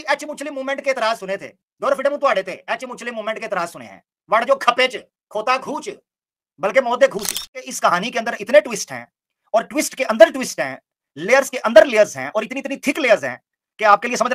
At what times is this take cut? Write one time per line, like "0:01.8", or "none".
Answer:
0:07.7